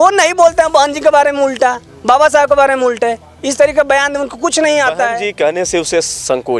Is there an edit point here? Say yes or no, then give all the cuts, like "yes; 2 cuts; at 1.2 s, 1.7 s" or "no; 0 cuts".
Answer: yes; 1 cut; at 5.3 s